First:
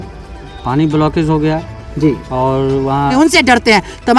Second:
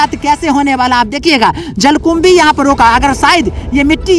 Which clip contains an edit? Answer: first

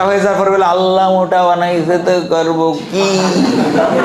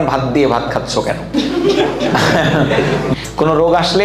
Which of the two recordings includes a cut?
second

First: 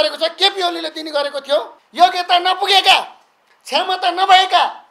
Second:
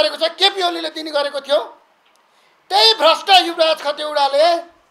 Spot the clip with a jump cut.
first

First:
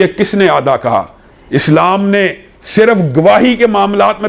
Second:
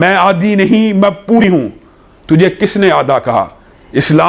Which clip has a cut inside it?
second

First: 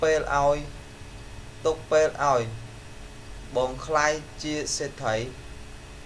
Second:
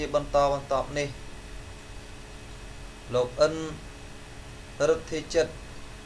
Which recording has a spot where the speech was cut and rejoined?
first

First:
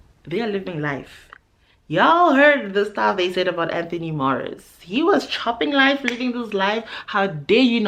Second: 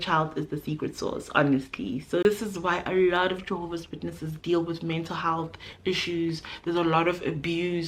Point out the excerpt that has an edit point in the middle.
second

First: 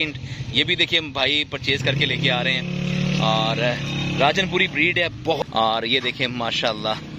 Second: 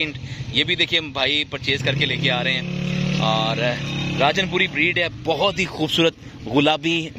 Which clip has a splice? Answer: first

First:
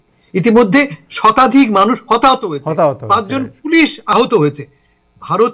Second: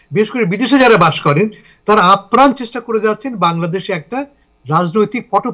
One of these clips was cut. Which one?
first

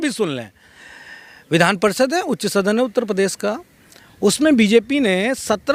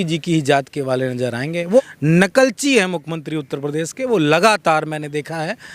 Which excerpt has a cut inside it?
second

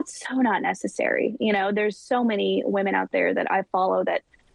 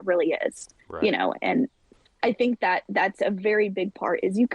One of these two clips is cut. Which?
second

